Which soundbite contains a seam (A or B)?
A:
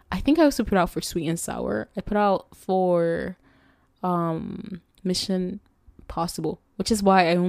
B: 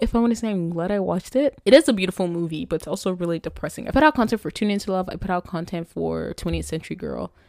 B